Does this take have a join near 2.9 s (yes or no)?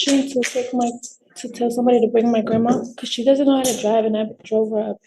yes